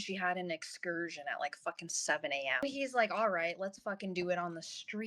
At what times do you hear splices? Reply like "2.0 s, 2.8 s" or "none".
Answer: 2.6 s